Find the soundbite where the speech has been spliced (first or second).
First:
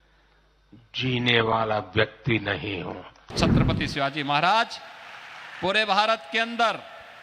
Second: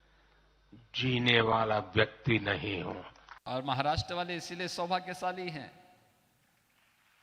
first